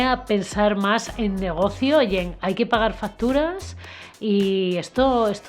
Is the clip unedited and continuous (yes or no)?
yes